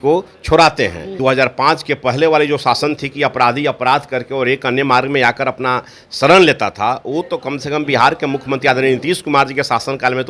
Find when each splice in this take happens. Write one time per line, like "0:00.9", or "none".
0:01.2